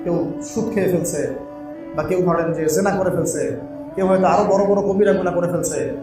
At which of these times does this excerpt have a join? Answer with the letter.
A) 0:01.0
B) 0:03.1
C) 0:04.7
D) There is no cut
D